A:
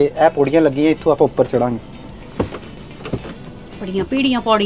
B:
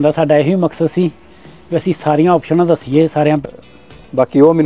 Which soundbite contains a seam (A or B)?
B